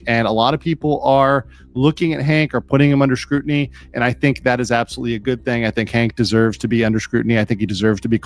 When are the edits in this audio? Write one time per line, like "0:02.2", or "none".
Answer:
none